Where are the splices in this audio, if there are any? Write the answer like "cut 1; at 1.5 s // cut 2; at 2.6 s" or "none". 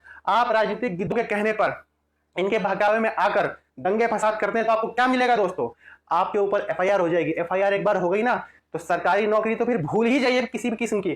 cut 1; at 1.1 s

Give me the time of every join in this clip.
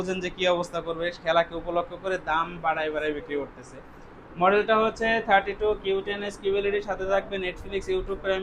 none

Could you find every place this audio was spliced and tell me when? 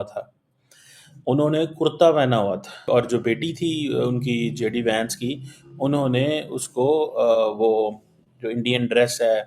cut 1; at 2.8 s

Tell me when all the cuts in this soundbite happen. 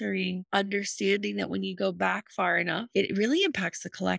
cut 1; at 2.9 s

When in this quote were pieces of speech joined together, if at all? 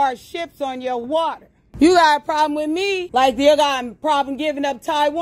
cut 1; at 1.0 s // cut 2; at 3.0 s

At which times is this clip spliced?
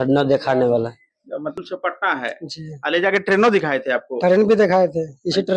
cut 1; at 1.6 s

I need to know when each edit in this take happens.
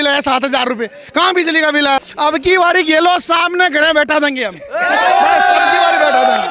cut 1; at 2.0 s

